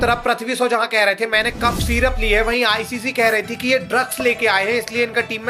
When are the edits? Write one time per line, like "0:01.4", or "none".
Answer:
none

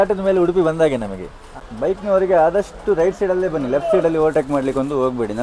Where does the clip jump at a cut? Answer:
0:01.6

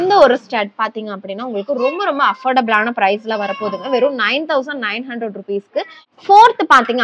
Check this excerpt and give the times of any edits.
0:06.0

